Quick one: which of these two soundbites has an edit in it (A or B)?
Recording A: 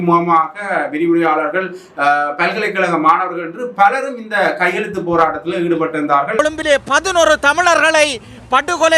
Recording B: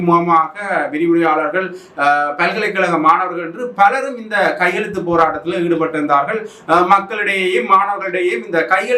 A